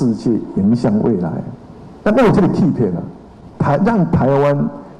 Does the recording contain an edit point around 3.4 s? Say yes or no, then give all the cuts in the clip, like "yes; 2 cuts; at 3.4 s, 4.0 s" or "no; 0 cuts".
yes; 1 cut; at 3.4 s